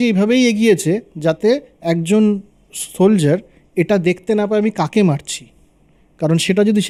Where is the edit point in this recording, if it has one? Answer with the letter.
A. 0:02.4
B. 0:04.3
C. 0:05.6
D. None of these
D